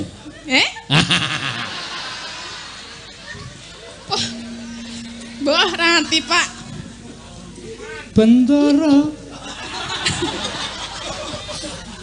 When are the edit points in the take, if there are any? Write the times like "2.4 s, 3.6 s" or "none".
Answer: none